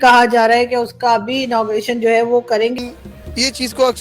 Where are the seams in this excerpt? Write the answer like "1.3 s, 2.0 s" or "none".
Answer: 2.7 s